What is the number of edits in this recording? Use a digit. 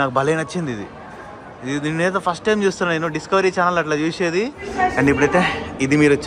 1